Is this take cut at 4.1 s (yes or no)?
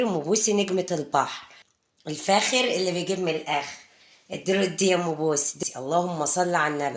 no